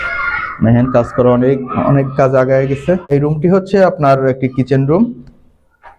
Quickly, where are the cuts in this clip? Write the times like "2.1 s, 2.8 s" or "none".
3.1 s